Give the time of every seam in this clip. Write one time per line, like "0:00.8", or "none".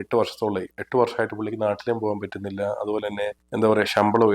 0:03.4